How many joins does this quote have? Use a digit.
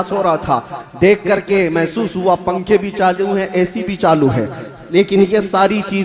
0